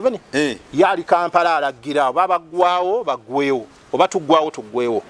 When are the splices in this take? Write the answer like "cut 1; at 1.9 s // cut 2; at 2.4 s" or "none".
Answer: none

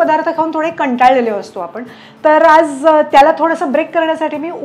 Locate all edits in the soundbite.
none

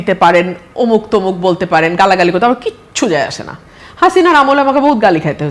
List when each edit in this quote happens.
none

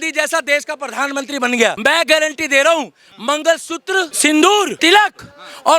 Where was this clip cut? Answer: cut 1; at 1.8 s // cut 2; at 4.1 s // cut 3; at 4.7 s

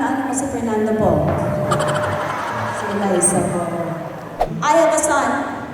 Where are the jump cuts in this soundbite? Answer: cut 1; at 4.3 s

